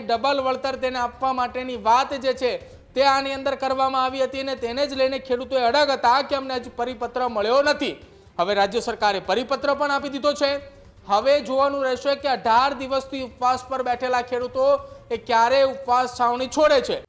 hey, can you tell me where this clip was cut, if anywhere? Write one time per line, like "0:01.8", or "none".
none